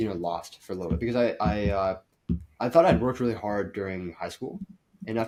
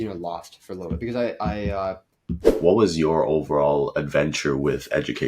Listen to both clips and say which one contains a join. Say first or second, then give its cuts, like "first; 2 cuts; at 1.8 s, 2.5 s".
second; 1 cut; at 2.5 s